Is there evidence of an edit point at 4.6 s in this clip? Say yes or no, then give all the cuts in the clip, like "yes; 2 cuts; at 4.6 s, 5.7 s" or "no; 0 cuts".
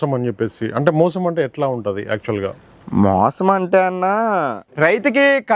yes; 1 cut; at 4.6 s